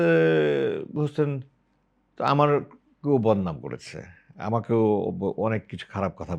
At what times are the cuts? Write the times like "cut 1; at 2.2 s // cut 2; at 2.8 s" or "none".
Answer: none